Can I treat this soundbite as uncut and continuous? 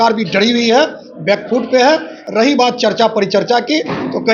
yes; 0 cuts

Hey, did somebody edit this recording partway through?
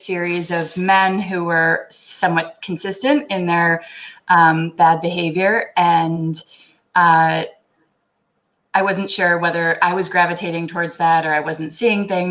no; 0 cuts

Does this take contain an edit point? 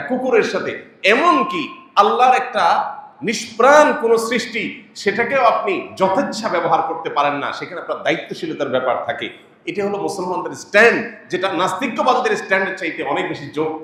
no; 0 cuts

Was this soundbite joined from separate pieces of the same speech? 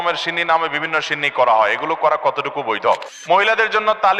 yes; 1 cut; at 3.1 s

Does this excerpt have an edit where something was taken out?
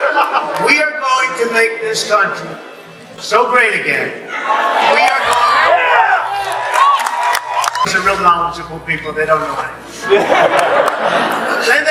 yes; 1 cut; at 8.0 s

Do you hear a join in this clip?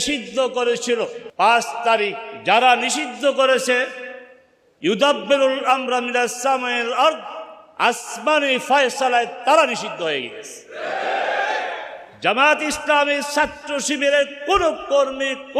yes; 1 cut; at 1.2 s

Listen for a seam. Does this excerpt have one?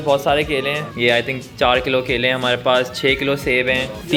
no; 0 cuts

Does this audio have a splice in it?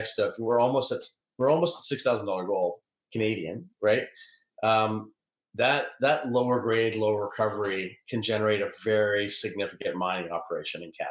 no; 0 cuts

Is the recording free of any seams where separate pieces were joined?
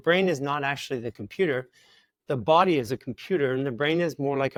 yes; 0 cuts

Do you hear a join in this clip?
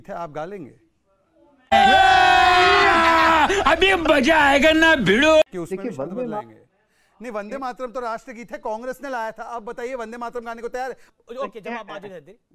no; 0 cuts

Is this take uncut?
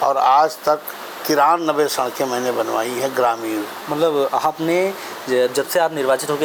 yes; 0 cuts

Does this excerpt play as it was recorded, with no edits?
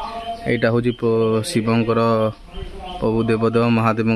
yes; 0 cuts

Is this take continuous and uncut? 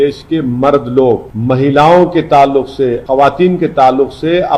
no; 2 cuts; at 1.3 s, 3.0 s

